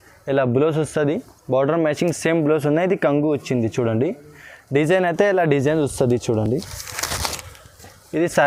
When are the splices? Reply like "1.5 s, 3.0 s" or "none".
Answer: none